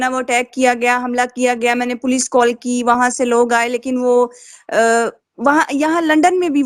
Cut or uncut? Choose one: uncut